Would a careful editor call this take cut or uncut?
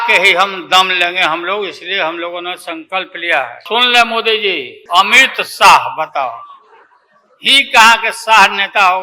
cut